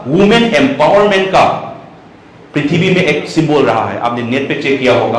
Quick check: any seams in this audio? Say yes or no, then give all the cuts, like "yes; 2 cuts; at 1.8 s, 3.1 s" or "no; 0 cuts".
no; 0 cuts